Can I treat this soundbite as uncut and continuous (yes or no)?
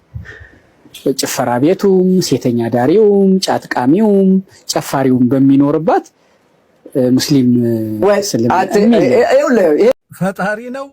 no